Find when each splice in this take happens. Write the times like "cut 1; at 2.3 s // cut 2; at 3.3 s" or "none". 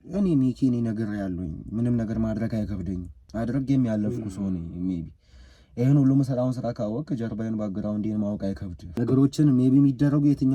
cut 1; at 3.1 s // cut 2; at 8.8 s